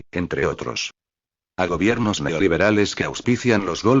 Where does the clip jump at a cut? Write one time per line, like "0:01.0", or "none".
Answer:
0:01.6